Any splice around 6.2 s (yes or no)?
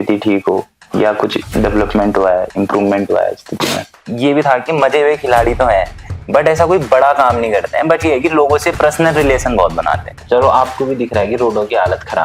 no